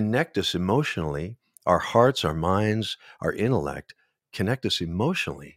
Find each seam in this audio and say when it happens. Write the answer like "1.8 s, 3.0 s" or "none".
none